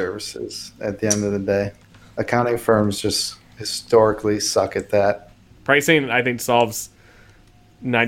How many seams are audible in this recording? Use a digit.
2